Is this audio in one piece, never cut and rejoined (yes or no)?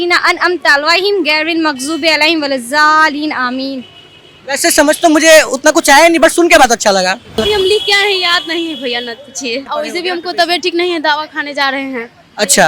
no